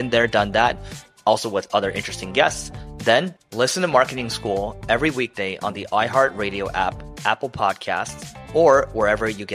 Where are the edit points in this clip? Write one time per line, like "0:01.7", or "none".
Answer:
none